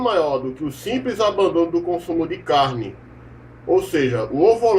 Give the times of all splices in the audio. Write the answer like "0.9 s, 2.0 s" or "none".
none